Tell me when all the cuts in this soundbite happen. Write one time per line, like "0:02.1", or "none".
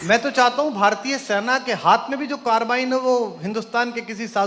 none